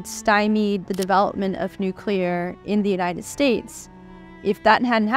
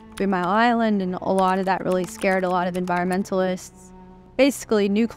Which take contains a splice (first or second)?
second